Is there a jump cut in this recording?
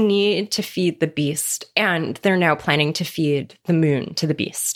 no; 0 cuts

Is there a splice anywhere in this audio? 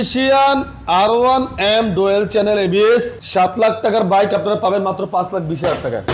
no; 0 cuts

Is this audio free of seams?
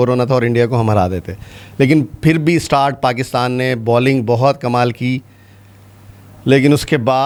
yes; 0 cuts

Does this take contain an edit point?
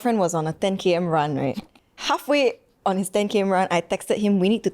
yes; 1 cut; at 2.0 s

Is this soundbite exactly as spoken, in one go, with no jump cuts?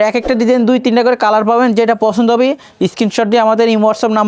yes; 0 cuts

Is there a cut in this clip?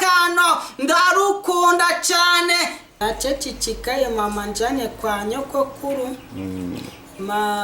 yes; 1 cut; at 2.8 s

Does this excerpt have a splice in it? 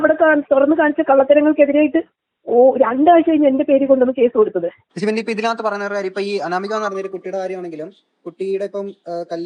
yes; 1 cut; at 4.8 s

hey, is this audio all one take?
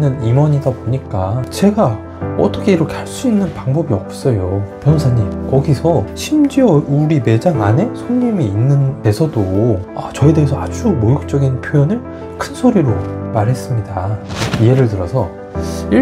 no; 2 cuts; at 5.3 s, 14.2 s

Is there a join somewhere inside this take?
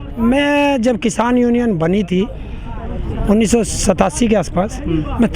no; 0 cuts

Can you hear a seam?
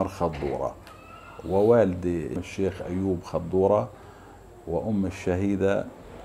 yes; 1 cut; at 2.5 s

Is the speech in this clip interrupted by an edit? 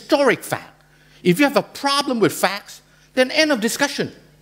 no; 0 cuts

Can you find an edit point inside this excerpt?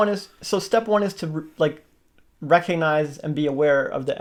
no; 0 cuts

